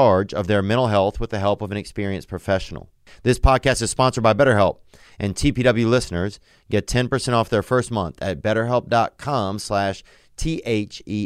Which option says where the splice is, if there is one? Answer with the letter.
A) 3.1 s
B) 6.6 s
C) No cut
A